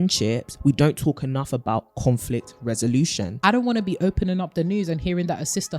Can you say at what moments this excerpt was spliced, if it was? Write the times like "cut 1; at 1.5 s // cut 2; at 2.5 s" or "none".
cut 1; at 3.3 s

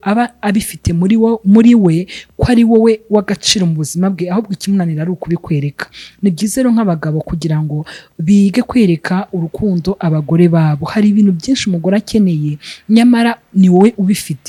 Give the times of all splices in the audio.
none

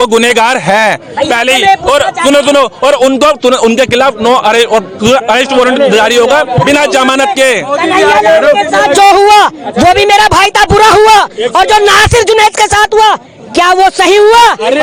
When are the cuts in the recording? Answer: none

